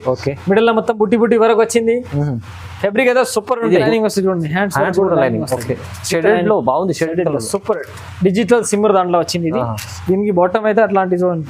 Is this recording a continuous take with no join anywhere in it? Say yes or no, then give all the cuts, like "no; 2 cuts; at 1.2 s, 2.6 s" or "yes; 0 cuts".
no; 1 cut; at 3.9 s